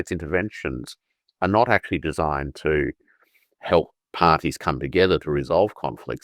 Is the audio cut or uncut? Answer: uncut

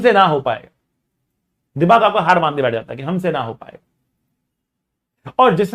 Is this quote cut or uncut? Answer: uncut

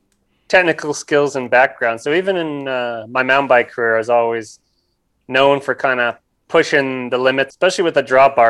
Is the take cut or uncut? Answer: cut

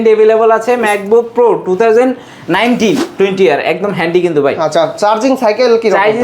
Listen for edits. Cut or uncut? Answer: cut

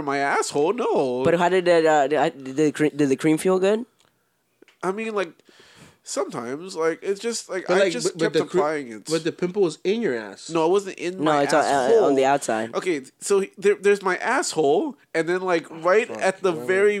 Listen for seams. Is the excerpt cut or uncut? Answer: uncut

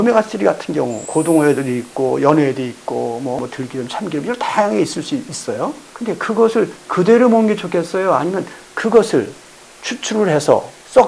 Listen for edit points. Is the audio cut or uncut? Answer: cut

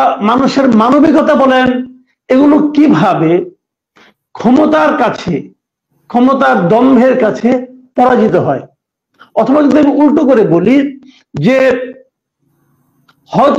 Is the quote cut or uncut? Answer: uncut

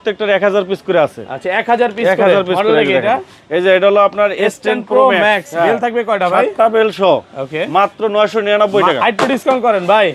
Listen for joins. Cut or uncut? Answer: uncut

